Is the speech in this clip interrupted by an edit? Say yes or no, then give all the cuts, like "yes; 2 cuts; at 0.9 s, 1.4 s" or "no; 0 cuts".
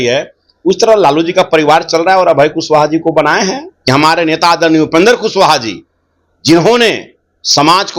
yes; 1 cut; at 3.7 s